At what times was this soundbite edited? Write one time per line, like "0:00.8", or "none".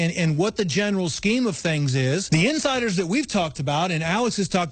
0:02.2